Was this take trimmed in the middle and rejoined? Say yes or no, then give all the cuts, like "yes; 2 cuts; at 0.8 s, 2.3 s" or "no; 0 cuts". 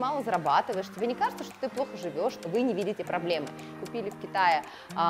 yes; 2 cuts; at 2.4 s, 3.7 s